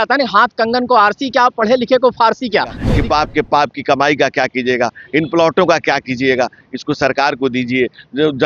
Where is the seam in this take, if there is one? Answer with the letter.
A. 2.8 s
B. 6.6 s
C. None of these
A